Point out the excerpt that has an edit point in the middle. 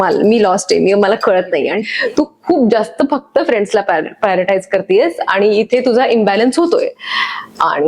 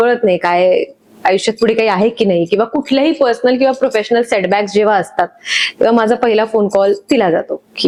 first; 1 cut; at 1.9 s

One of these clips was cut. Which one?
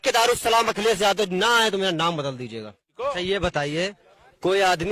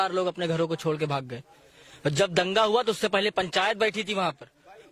first; 1 cut; at 2.9 s

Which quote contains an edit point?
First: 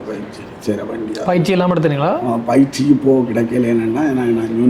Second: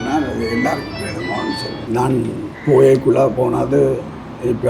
second; 1 cut; at 1.8 s

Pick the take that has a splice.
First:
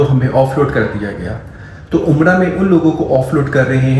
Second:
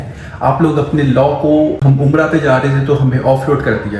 second; 1 cut; at 1.8 s

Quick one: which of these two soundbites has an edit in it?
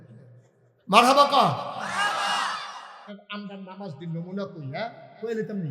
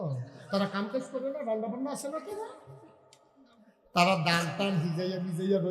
first; 1 cut; at 3.2 s

